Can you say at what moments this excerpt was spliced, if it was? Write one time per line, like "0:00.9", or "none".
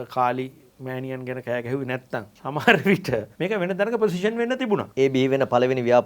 0:02.3
0:03.3
0:04.9